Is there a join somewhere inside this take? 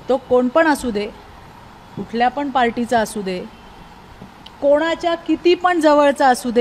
no; 0 cuts

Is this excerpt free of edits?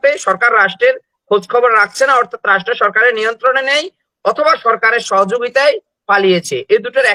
yes; 0 cuts

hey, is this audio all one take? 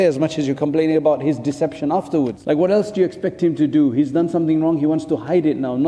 no; 1 cut; at 2.4 s

